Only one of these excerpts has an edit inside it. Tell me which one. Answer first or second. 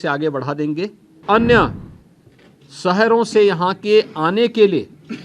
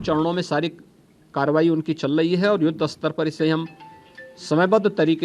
first